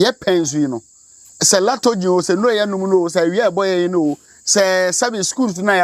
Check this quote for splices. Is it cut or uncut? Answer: uncut